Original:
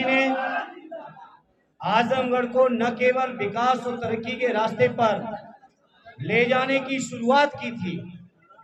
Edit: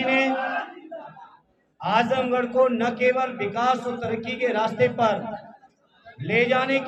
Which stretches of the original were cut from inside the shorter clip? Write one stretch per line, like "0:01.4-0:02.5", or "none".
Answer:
none